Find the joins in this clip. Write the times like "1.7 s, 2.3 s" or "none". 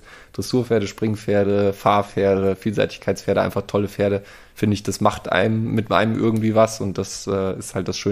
none